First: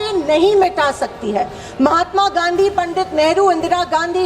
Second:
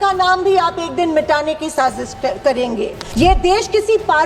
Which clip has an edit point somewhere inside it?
second; 1 cut; at 3.0 s

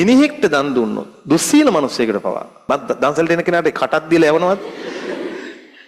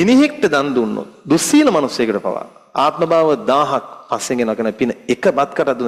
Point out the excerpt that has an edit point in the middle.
first; 1 cut; at 2.7 s

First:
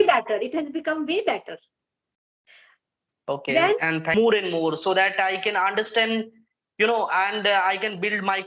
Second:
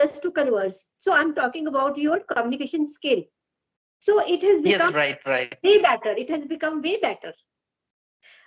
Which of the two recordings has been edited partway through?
first; 1 cut; at 4.1 s

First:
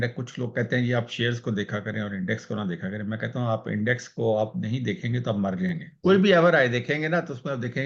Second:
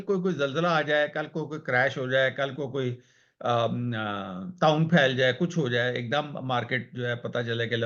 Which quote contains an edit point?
first; 1 cut; at 5.9 s

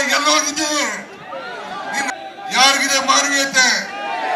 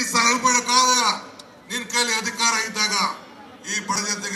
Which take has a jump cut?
first; 1 cut; at 2.1 s

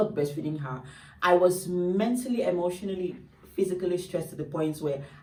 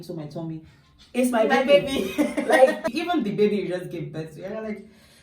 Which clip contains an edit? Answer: second; 1 cut; at 2.9 s

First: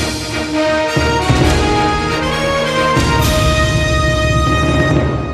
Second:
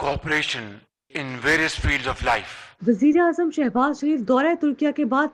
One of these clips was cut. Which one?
second; 1 cut; at 2.6 s

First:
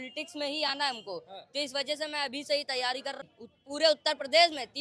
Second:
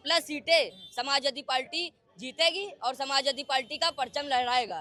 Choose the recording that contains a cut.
first; 1 cut; at 3.2 s

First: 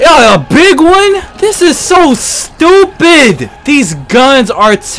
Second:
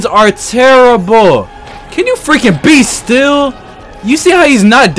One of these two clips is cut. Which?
first; 2 cuts; at 1.3 s, 3.5 s

